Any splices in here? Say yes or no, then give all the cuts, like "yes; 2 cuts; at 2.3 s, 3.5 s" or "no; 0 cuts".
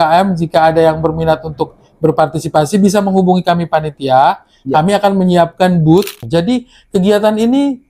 yes; 1 cut; at 6.2 s